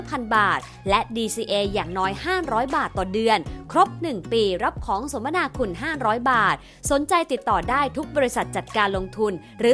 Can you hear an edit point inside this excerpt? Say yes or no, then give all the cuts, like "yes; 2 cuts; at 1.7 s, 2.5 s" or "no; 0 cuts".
no; 0 cuts